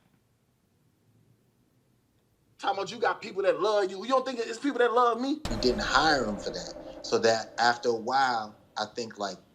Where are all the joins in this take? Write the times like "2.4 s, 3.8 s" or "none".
5.4 s